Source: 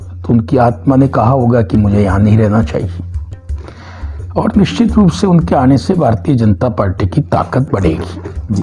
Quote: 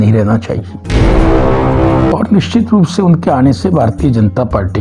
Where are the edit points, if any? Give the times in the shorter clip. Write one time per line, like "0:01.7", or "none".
none